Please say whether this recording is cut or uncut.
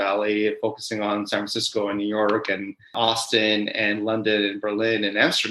cut